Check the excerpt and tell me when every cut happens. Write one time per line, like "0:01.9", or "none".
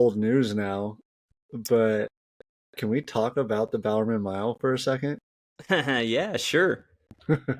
none